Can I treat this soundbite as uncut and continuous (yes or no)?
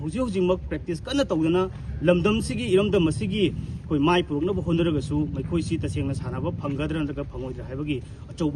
yes